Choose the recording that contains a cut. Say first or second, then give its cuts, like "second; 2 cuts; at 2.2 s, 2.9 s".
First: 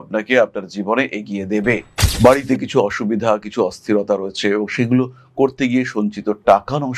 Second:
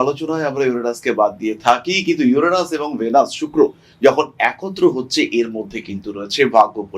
first; 1 cut; at 1.9 s